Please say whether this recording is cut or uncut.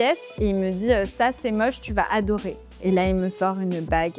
uncut